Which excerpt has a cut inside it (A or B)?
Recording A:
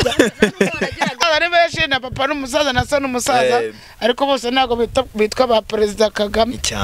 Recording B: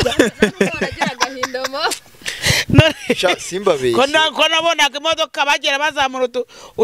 A